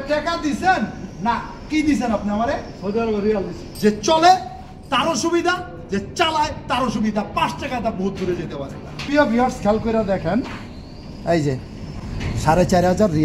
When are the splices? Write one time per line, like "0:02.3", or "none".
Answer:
0:03.6
0:08.9